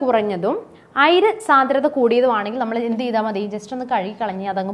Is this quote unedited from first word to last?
yes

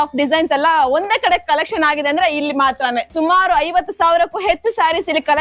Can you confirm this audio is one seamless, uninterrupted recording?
no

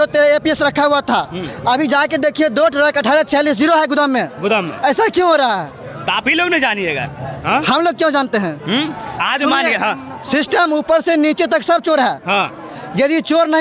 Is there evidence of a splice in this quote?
no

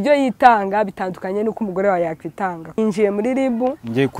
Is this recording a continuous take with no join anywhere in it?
no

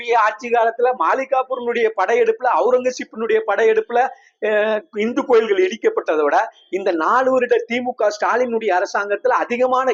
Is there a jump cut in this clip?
no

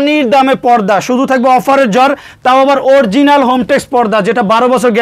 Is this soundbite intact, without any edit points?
yes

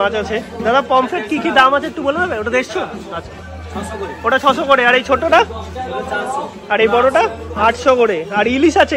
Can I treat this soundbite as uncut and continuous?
yes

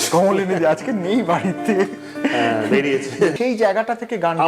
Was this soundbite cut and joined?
yes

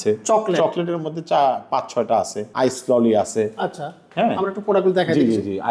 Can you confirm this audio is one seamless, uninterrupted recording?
no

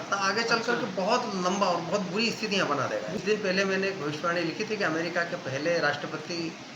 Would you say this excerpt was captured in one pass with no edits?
no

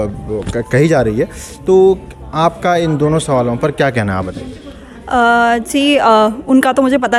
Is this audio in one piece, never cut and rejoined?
yes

